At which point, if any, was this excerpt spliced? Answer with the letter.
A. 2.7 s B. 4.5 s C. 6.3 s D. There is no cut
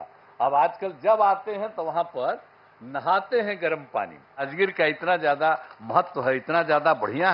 B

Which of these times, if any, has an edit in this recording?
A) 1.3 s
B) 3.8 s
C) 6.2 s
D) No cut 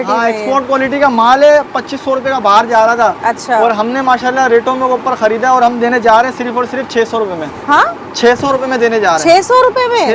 D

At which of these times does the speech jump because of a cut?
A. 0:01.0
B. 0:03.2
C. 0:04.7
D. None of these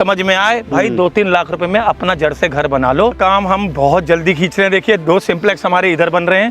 B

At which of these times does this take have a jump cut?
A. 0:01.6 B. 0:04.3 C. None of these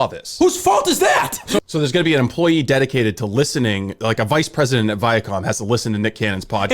A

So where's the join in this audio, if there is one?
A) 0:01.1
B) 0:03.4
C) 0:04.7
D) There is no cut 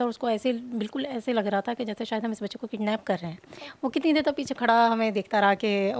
D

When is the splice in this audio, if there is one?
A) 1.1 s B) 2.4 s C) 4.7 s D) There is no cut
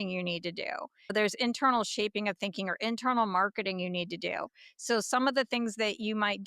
A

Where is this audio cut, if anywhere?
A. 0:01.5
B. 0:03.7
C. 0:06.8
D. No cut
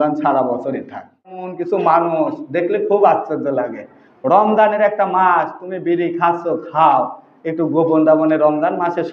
A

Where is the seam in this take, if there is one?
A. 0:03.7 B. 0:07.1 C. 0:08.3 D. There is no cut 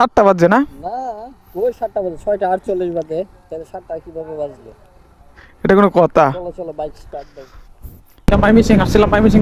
C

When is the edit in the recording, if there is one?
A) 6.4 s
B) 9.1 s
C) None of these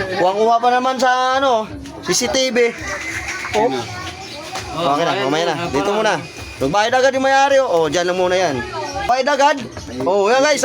B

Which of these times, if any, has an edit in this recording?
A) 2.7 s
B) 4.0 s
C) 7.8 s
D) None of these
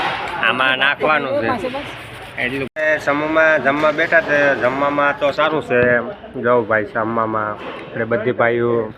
A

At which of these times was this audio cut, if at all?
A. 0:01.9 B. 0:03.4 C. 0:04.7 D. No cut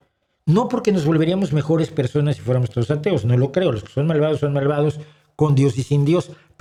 D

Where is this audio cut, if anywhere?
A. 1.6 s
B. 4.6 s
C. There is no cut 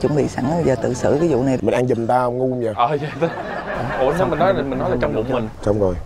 A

